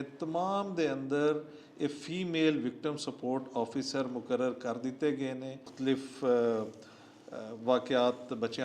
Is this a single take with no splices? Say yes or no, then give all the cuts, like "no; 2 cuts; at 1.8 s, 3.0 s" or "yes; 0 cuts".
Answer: no; 1 cut; at 5.5 s